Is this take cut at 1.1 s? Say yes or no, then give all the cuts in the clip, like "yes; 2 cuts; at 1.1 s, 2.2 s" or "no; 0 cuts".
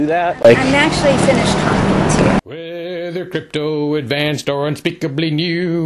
no; 1 cut; at 2.5 s